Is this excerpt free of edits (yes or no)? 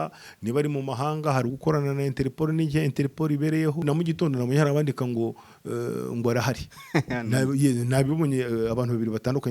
no